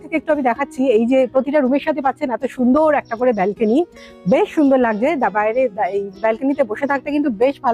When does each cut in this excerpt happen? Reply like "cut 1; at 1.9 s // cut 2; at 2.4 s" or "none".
none